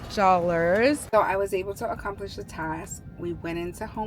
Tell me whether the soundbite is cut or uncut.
cut